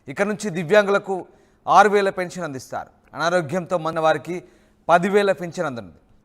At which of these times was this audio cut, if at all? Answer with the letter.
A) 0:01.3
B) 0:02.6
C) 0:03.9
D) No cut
C